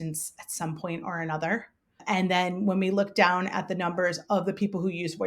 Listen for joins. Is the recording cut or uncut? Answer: cut